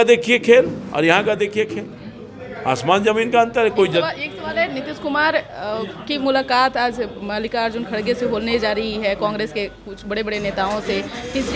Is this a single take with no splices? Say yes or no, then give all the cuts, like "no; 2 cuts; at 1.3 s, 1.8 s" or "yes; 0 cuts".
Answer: yes; 0 cuts